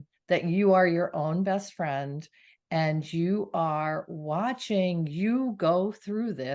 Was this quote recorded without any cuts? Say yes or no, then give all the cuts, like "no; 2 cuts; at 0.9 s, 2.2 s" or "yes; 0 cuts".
yes; 0 cuts